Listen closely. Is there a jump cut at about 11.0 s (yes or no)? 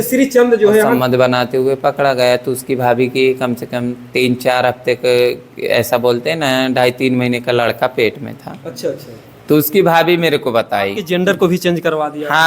yes